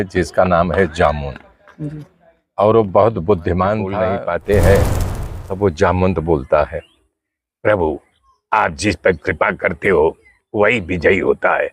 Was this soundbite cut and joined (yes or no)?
yes